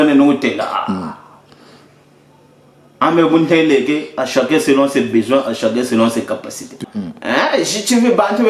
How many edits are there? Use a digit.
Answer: 1